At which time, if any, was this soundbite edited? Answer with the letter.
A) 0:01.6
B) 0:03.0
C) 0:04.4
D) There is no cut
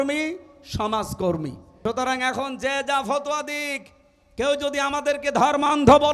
A